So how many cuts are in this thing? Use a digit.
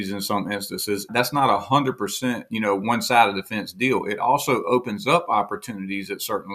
1